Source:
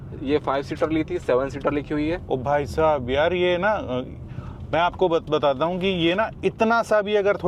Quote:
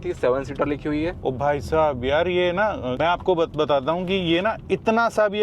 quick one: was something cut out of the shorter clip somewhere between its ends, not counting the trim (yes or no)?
yes